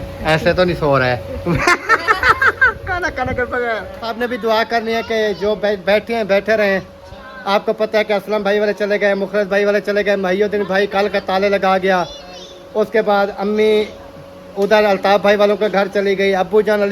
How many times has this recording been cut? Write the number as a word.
one